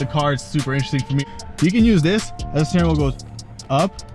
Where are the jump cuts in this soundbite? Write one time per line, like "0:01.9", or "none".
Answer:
0:01.2